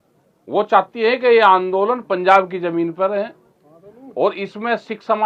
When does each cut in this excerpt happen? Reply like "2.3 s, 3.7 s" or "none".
none